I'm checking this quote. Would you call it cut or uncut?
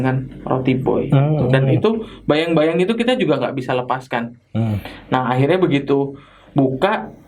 uncut